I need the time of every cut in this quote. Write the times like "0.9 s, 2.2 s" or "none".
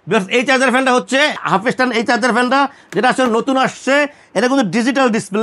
1.4 s